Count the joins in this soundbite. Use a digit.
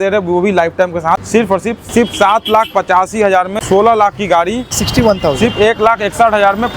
3